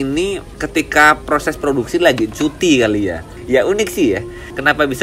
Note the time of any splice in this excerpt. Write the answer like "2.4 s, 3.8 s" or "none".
3.3 s

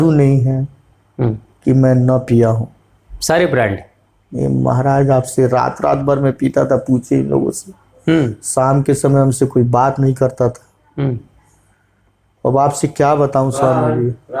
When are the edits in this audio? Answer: none

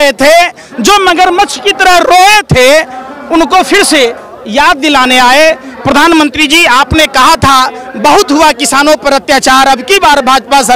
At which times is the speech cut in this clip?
none

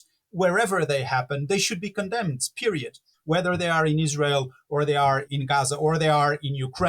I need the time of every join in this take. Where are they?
3.1 s, 5.3 s

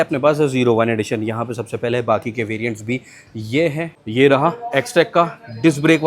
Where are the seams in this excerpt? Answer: 3.9 s

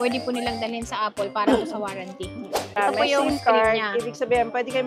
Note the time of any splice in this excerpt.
2.8 s

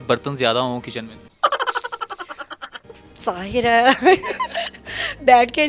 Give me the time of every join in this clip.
none

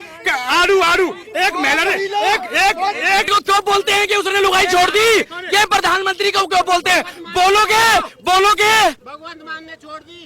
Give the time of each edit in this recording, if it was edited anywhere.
3.3 s

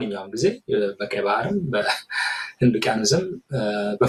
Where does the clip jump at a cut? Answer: none

